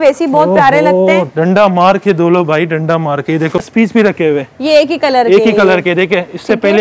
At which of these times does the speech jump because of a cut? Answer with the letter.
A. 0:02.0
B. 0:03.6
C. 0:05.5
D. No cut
B